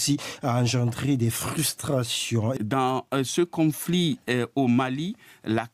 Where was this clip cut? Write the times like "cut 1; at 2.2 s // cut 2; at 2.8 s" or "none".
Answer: cut 1; at 2.6 s